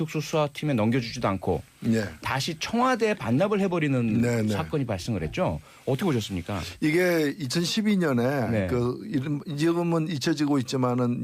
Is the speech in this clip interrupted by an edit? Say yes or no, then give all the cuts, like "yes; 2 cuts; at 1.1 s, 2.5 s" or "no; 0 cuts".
yes; 1 cut; at 10.0 s